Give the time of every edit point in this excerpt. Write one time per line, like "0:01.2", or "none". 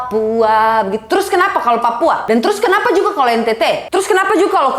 0:02.2
0:03.8